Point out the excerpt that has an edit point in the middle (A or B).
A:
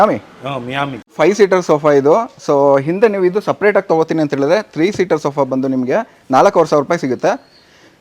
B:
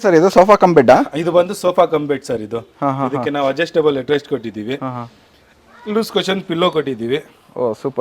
A